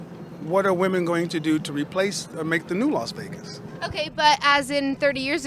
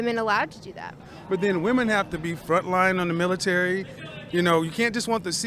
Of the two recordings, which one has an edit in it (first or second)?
second